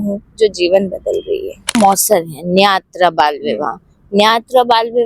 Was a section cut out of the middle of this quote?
yes; 1 cut; at 1.8 s

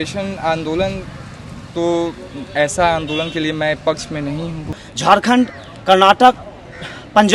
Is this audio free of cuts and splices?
no; 1 cut; at 4.8 s

